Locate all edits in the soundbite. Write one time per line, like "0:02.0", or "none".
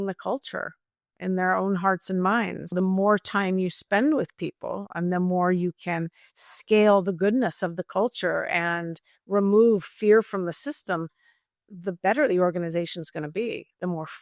0:02.6